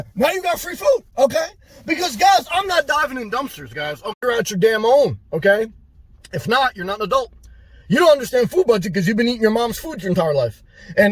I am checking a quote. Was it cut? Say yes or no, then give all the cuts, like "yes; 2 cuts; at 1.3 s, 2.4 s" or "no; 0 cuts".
yes; 1 cut; at 4.2 s